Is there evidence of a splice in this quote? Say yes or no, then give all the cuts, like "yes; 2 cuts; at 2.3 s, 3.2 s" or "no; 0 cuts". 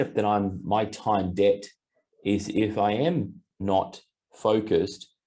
yes; 1 cut; at 3.4 s